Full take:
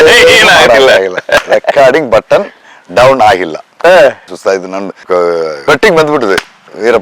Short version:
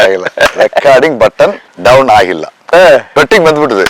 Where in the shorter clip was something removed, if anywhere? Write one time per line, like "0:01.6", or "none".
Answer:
0:01.7
0:03.1